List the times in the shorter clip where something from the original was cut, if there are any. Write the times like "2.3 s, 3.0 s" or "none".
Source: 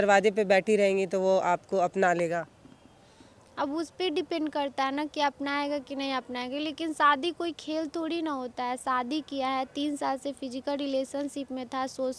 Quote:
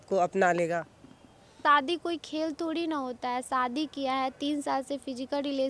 1.6 s